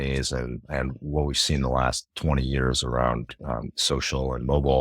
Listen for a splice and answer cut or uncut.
uncut